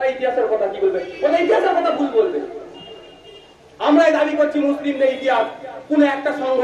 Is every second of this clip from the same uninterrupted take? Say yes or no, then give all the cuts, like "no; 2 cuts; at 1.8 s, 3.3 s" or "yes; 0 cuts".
yes; 0 cuts